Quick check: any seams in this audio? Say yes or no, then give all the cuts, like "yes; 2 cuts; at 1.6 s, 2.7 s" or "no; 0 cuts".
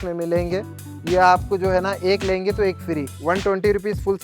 yes; 1 cut; at 3.1 s